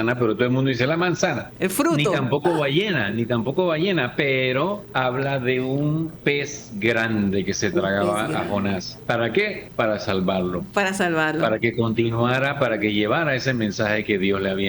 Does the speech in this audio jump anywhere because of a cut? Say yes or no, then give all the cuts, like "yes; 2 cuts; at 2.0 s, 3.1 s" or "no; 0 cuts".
yes; 5 cuts; at 1.5 s, 4.8 s, 6.3 s, 8.9 s, 9.6 s